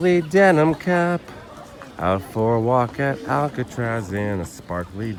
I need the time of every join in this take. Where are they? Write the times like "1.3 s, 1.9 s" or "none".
none